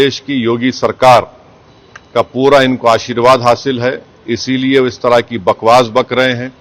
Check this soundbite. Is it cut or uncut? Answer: uncut